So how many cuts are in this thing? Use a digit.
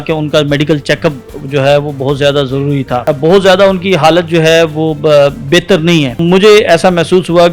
2